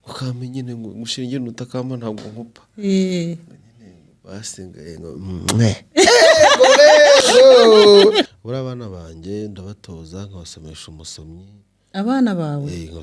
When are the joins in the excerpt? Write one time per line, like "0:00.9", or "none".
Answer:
0:08.3